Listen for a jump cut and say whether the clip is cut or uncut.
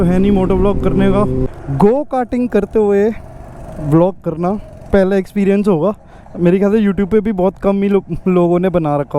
cut